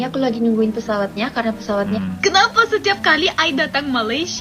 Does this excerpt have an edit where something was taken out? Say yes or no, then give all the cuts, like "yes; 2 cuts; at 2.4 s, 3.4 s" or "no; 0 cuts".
yes; 1 cut; at 1.9 s